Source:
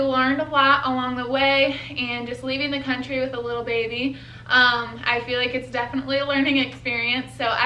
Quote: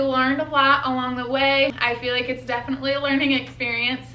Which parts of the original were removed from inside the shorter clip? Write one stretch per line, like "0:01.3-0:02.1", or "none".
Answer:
0:01.8-0:05.0